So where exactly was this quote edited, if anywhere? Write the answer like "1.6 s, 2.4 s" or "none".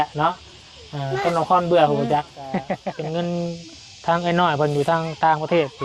2.8 s